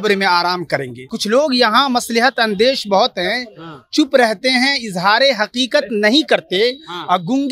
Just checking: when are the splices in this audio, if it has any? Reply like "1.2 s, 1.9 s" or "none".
1.1 s